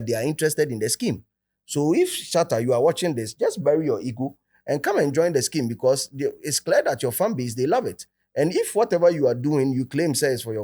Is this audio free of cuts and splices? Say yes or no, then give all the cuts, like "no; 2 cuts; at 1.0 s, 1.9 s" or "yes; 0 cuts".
yes; 0 cuts